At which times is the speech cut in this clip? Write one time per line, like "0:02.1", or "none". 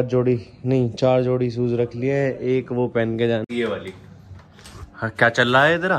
0:03.4